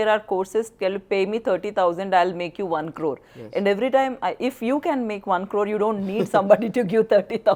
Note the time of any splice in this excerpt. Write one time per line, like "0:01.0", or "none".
none

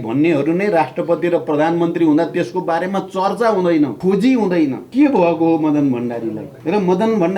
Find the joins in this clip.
0:04.0
0:04.8
0:06.5

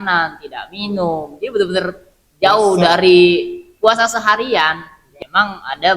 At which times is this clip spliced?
0:05.0

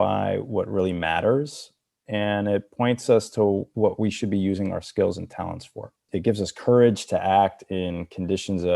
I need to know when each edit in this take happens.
0:03.7
0:06.1

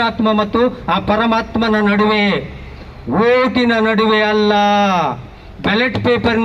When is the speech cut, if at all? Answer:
none

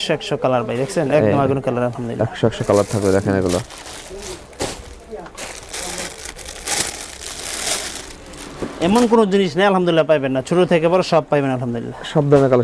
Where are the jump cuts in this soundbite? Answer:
none

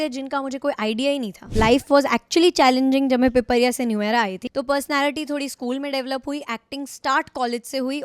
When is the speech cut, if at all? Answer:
0:01.4
0:04.4

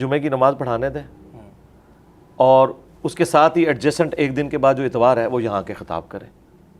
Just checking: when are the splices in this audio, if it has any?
none

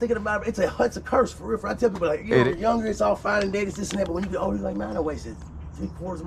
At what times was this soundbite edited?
0:02.5

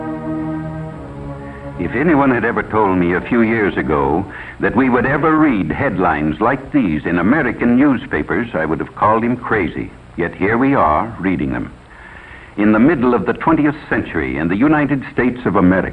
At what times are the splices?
none

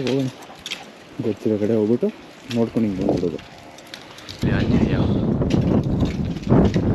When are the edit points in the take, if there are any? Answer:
0:04.4

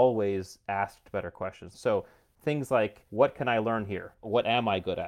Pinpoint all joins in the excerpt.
0:01.7
0:03.0
0:04.2

